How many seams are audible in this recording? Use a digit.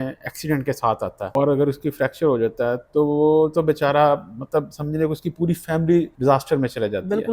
2